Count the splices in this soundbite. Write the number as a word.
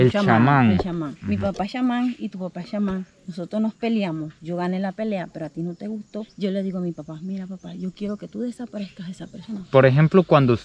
one